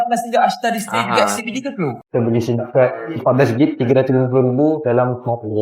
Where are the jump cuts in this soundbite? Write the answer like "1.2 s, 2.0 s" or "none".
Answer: 2.0 s

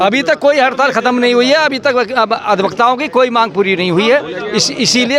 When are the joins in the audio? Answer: none

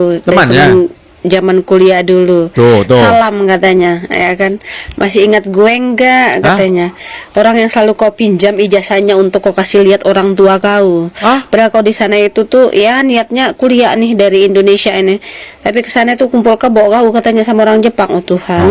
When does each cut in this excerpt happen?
none

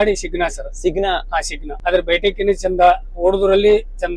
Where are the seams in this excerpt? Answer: 1.6 s

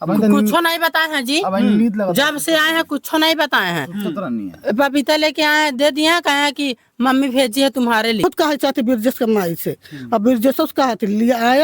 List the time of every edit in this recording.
8.2 s

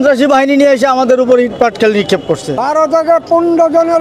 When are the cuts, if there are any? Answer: 2.6 s

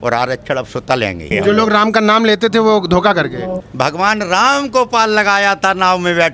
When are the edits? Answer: 1.3 s, 3.6 s

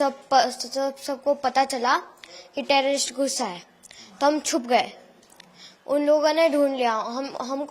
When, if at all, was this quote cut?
none

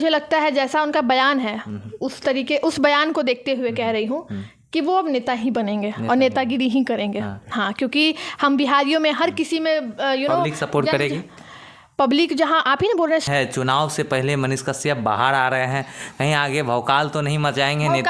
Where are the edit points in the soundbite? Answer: 13.3 s

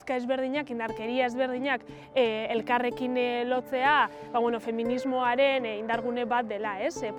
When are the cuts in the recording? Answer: none

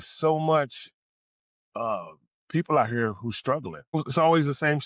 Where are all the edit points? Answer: 4.0 s

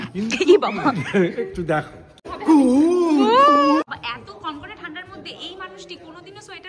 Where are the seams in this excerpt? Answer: 2.3 s, 3.8 s

